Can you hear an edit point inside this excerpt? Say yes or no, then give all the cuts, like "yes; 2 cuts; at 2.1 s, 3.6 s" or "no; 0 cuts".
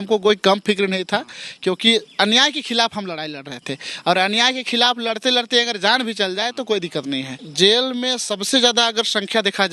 yes; 1 cut; at 7.4 s